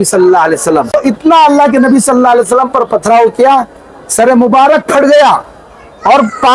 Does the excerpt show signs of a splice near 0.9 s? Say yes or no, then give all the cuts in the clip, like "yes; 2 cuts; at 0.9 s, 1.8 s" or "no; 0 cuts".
yes; 1 cut; at 0.9 s